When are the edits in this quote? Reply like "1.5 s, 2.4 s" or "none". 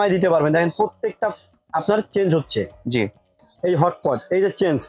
3.4 s